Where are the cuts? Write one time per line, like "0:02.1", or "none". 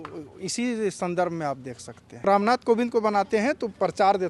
0:02.2